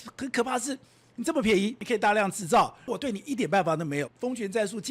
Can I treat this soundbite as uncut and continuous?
no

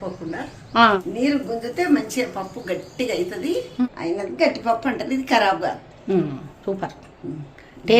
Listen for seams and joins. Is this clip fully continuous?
no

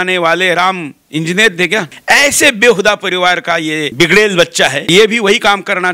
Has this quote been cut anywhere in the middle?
yes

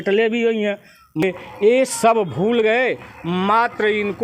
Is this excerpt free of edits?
no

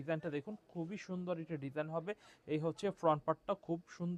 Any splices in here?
no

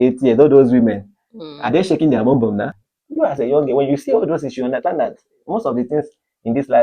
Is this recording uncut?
no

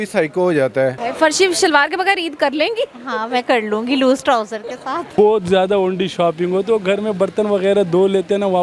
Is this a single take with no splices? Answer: no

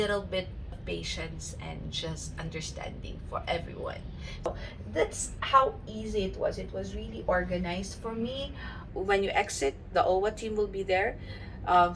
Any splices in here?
yes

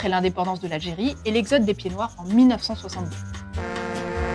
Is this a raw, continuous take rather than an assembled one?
yes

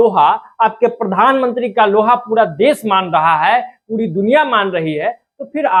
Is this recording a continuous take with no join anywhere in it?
yes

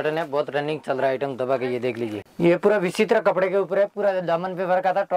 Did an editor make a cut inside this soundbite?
yes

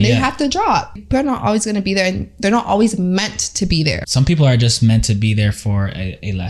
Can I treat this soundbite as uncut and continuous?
no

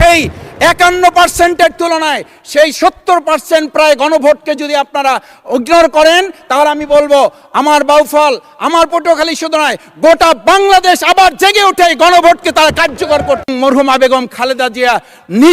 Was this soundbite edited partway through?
yes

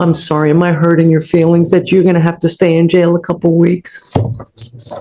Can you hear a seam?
no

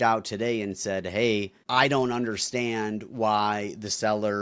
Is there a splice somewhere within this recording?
yes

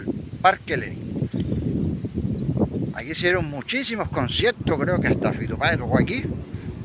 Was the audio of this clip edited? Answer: no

